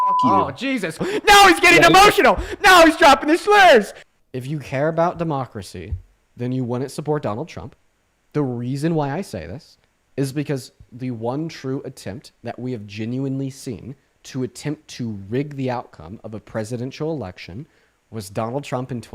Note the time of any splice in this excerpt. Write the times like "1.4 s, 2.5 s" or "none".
1.0 s, 4.0 s